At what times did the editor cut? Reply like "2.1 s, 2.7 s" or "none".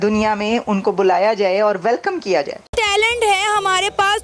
2.6 s